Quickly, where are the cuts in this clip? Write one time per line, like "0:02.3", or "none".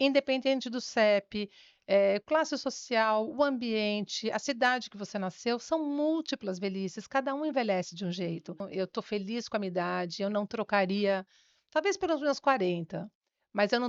0:08.7

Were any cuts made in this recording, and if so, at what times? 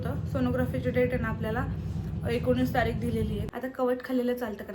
0:03.5

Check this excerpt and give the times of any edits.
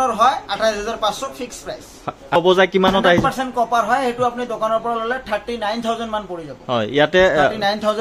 0:02.4

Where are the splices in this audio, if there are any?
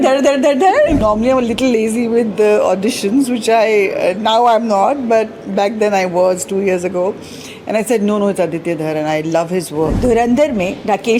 0:01.0
0:10.0

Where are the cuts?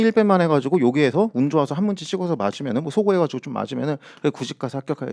none

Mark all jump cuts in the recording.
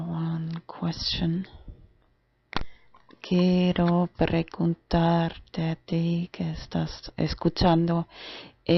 none

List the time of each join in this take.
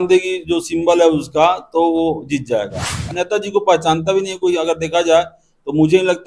0:03.0

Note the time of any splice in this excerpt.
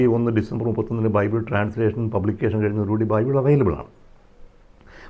none

